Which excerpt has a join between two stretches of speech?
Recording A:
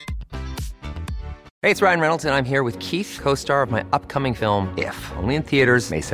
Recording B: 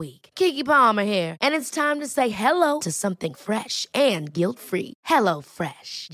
A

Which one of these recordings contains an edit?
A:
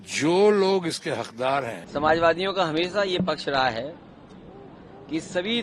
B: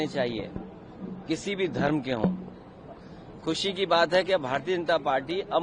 A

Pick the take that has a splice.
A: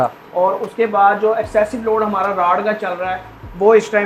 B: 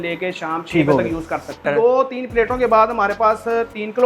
B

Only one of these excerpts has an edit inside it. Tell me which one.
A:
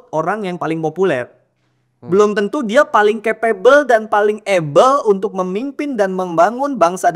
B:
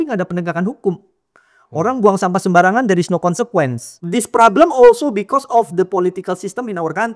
B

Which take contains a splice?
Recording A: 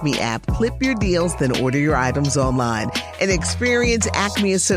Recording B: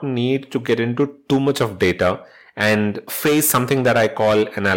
B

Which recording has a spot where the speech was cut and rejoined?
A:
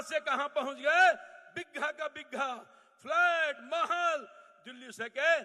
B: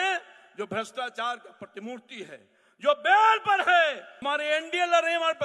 B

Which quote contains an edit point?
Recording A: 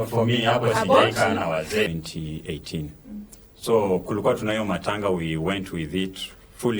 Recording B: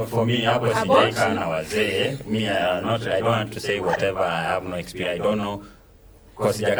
A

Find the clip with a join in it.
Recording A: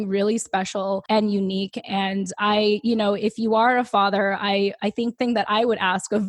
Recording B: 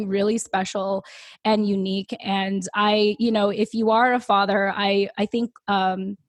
A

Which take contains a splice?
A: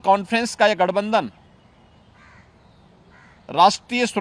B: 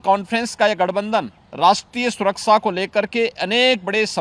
B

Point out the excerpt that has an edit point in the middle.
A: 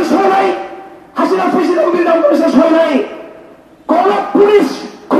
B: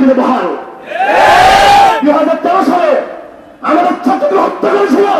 B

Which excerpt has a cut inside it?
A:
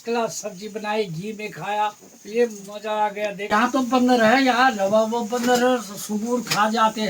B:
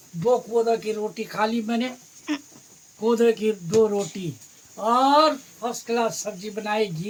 A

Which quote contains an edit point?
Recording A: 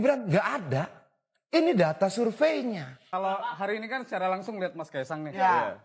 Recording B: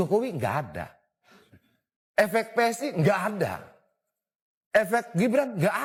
A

